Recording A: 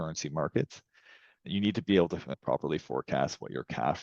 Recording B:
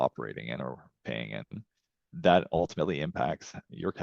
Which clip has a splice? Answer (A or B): A